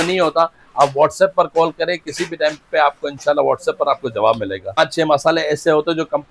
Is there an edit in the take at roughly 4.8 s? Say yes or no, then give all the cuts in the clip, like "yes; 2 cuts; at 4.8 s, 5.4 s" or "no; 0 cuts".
yes; 1 cut; at 4.8 s